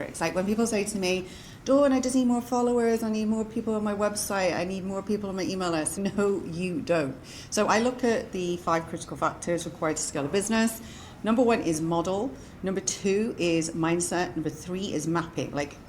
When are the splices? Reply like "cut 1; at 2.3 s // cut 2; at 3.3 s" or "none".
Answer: cut 1; at 6.0 s